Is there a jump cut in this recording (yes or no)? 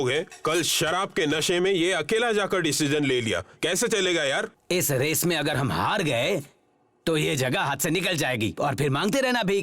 yes